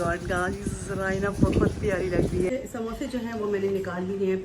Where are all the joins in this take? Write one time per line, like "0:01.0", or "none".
0:02.5